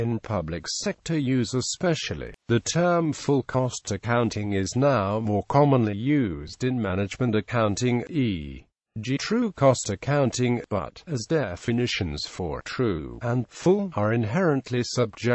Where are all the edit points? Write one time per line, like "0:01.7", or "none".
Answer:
none